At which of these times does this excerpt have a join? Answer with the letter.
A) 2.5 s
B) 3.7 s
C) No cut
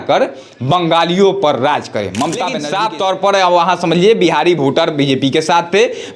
A